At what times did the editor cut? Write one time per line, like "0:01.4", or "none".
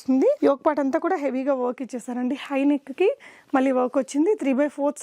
none